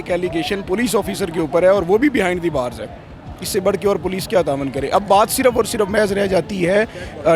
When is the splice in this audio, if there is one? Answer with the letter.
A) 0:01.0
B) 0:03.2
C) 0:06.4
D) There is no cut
D